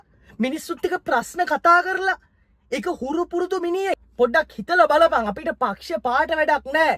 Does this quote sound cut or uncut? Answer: cut